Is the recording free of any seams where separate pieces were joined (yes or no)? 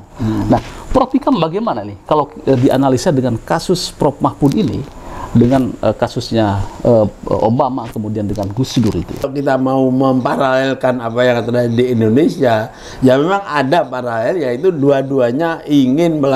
no